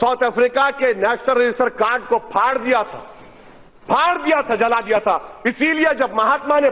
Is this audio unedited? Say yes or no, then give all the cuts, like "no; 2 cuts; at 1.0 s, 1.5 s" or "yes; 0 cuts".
yes; 0 cuts